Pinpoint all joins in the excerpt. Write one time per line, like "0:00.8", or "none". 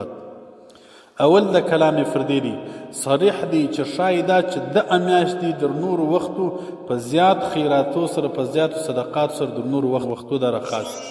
0:10.1